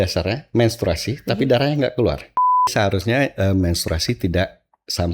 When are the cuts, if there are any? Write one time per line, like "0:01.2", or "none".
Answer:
0:02.7